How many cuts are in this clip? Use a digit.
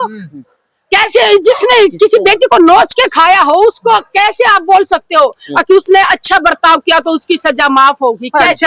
0